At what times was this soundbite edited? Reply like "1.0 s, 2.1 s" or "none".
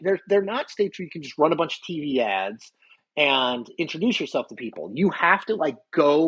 none